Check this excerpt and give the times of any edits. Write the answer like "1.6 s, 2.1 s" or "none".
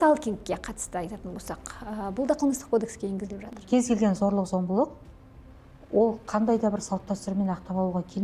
3.3 s